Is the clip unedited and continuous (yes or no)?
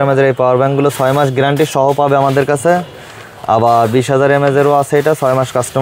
yes